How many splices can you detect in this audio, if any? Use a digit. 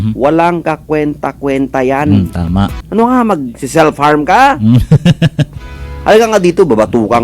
1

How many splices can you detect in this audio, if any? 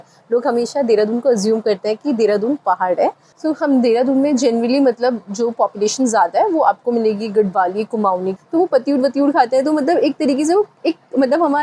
2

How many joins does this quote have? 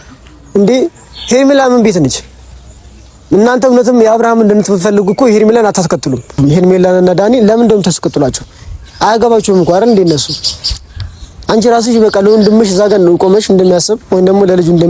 1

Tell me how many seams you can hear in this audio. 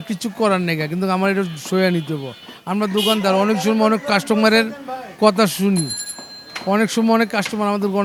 0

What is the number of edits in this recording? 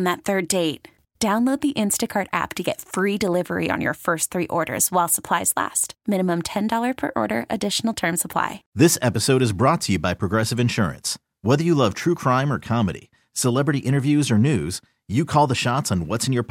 1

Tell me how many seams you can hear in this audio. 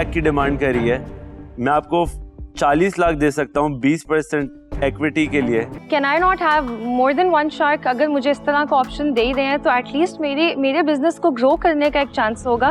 1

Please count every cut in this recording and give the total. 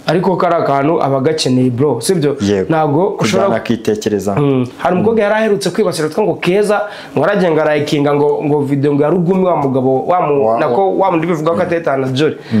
1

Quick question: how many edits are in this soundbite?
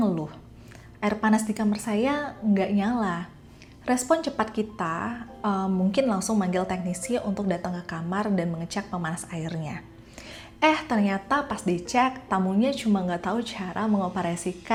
0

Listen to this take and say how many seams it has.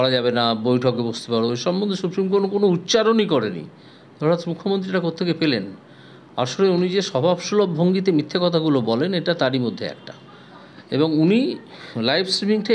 0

